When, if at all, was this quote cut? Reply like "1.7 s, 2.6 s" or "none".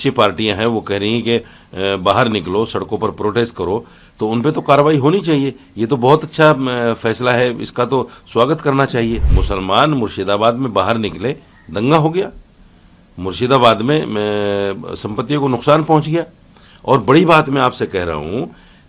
9.3 s